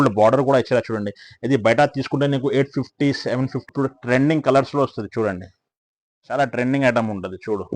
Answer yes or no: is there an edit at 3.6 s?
yes